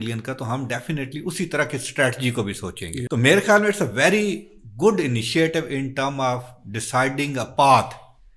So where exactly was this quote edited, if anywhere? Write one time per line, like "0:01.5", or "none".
0:03.0